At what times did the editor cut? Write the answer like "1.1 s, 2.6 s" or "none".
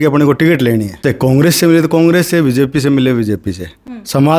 0.9 s